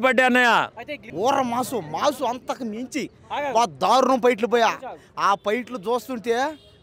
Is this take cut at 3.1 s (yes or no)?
no